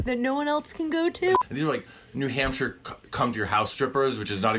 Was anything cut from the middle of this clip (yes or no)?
yes